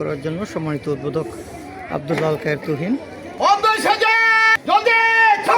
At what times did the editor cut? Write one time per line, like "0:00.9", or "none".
0:03.2
0:04.5